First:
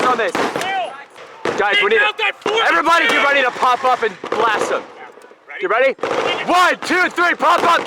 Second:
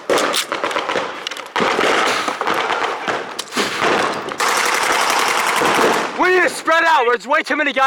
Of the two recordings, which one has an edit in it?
first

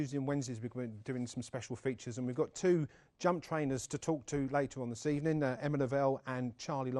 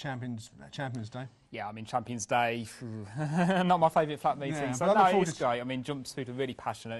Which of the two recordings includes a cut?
first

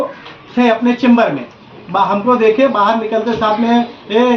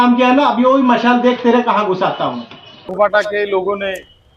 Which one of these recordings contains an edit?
second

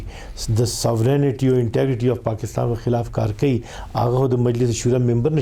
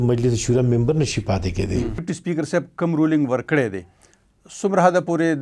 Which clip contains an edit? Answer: second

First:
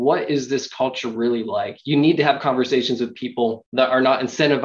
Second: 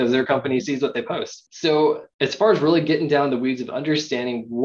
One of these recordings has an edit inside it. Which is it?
first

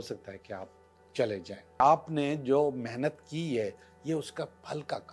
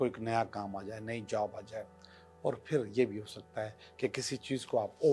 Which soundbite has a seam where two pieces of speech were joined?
first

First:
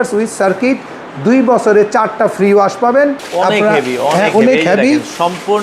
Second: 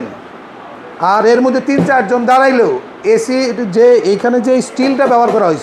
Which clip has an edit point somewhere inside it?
first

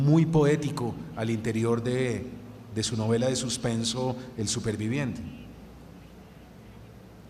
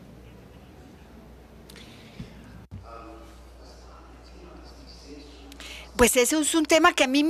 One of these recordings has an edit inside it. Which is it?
second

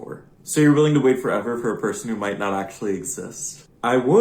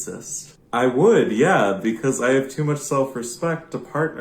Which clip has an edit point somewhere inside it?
first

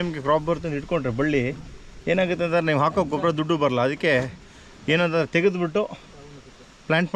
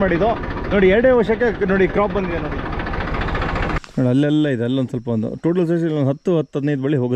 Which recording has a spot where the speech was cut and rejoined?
second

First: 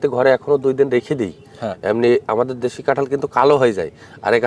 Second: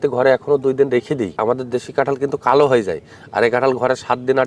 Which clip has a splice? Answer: second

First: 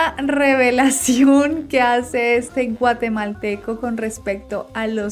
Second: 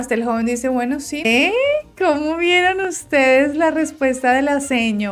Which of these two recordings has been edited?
second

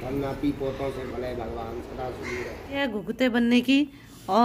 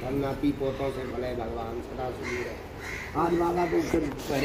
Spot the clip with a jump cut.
first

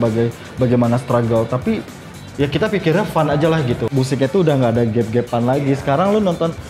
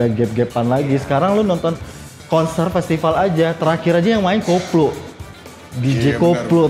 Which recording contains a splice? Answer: first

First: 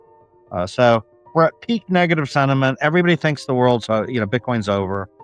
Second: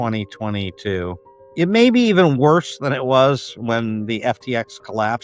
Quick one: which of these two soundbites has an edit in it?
second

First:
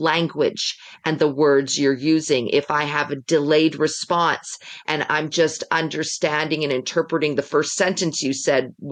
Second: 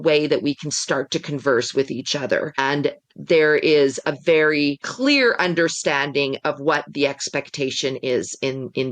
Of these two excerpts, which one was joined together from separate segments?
second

